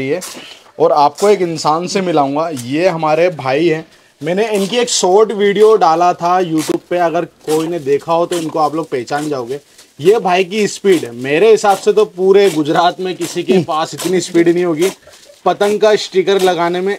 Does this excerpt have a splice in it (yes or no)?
no